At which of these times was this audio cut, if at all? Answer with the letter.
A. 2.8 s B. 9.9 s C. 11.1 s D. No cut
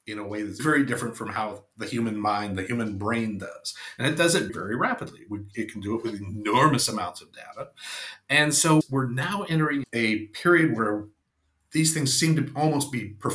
B